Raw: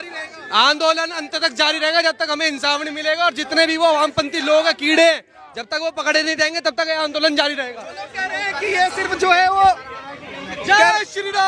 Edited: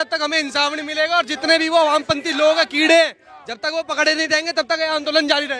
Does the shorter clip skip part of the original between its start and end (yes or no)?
no